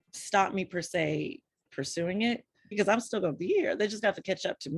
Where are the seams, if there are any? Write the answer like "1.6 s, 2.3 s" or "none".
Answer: 2.7 s